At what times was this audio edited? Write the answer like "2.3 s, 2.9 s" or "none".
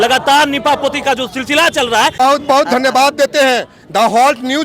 2.1 s